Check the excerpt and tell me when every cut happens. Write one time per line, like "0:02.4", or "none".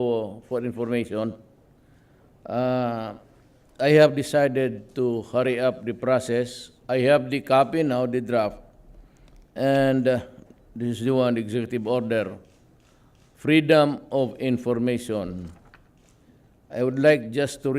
0:04.7